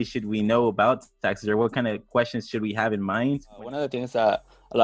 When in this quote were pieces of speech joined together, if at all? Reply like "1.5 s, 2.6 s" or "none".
3.6 s